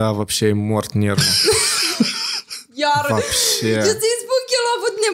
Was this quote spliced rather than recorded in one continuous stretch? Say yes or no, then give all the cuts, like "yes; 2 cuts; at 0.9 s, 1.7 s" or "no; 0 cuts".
no; 0 cuts